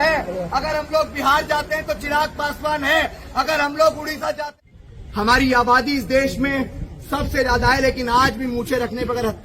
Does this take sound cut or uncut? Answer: cut